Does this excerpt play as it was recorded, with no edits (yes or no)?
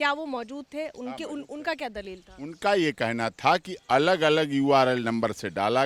yes